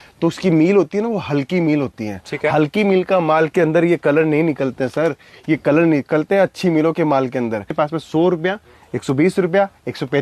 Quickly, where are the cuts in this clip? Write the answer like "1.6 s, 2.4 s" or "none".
7.7 s